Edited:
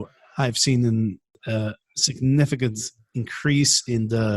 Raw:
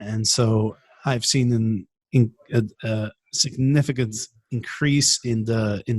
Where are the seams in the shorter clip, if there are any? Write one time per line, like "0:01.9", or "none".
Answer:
0:01.4